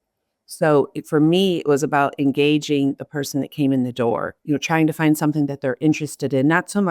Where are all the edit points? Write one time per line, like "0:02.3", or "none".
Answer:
0:04.3